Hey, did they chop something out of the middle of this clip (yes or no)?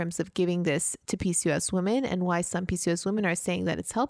no